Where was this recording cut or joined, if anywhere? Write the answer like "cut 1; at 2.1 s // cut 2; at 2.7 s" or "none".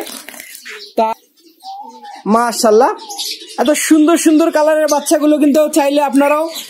cut 1; at 1.1 s